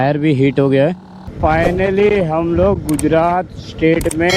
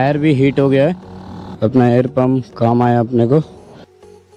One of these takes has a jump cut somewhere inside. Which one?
first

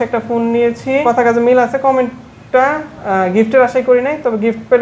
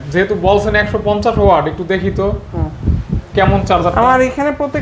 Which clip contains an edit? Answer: first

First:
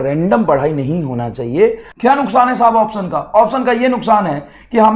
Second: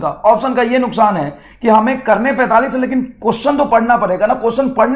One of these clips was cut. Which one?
first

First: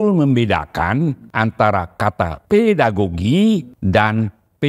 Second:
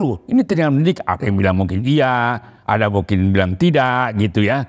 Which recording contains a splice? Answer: first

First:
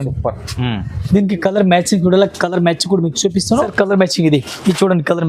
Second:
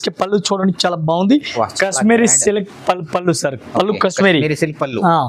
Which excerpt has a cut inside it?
first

